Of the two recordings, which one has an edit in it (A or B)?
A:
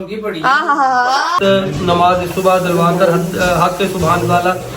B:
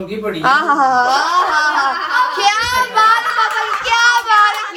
A